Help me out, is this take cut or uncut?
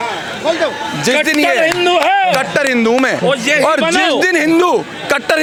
uncut